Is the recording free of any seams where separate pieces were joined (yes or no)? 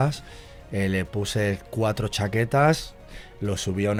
yes